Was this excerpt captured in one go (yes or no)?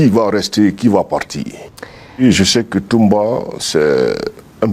no